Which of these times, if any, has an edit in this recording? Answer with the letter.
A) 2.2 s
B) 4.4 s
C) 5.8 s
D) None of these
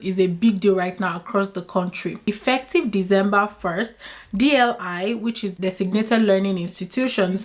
A